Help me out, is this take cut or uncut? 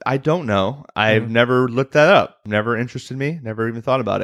cut